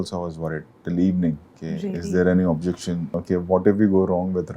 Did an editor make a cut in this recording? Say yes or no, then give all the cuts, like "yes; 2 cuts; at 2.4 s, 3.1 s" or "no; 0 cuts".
yes; 1 cut; at 3.1 s